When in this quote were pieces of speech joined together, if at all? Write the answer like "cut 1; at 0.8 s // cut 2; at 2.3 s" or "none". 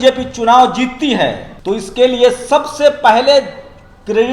cut 1; at 1.5 s

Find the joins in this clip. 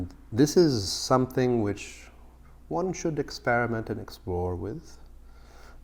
none

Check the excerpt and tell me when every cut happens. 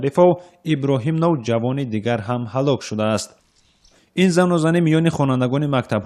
cut 1; at 2.3 s

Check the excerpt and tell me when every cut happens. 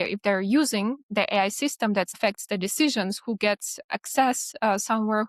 cut 1; at 2.2 s

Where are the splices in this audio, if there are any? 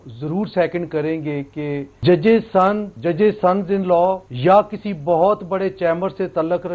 cut 1; at 1.9 s // cut 2; at 2.9 s // cut 3; at 4.3 s

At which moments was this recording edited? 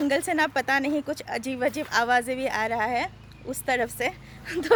none

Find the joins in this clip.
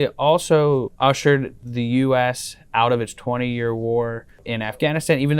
cut 1; at 0.9 s // cut 2; at 4.4 s

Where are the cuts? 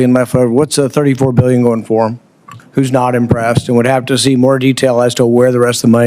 cut 1; at 2.6 s

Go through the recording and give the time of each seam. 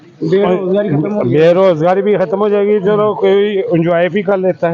none

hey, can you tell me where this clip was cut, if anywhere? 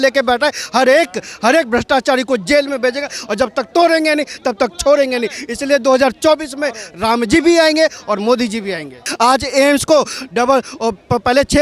cut 1; at 9.1 s

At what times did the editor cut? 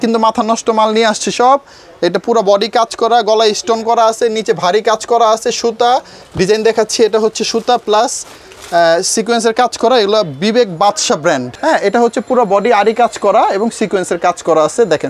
cut 1; at 6.2 s // cut 2; at 11.5 s

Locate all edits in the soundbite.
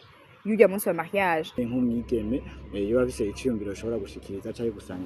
cut 1; at 1.7 s

